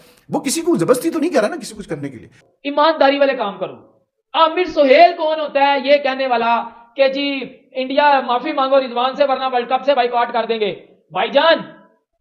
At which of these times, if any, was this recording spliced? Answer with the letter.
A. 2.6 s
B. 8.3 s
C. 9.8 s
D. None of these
A